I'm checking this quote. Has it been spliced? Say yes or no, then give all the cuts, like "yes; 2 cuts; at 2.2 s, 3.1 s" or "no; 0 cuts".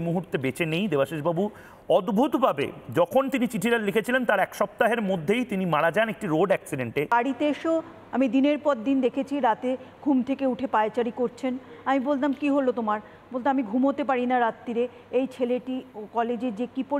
yes; 1 cut; at 7.1 s